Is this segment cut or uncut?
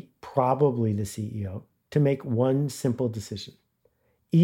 uncut